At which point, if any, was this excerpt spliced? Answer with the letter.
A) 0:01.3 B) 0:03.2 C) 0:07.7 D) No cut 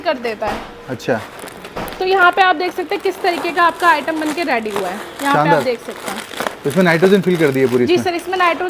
D